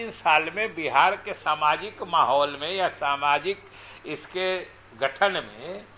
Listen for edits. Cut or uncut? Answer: uncut